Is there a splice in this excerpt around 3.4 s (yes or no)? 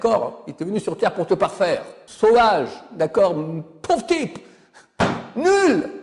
no